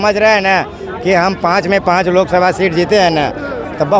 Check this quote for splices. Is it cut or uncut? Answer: uncut